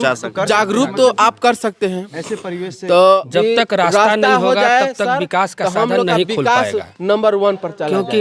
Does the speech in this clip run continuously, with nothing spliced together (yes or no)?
no